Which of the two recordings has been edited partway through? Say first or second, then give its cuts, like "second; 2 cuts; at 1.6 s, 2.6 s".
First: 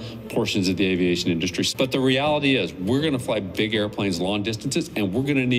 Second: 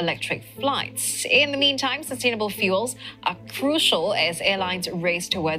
first; 1 cut; at 1.7 s